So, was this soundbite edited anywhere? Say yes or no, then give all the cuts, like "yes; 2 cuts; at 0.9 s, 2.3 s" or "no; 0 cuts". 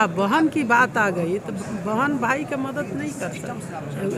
no; 0 cuts